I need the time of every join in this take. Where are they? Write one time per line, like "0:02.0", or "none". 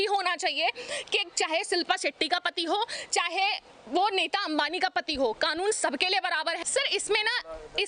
0:06.6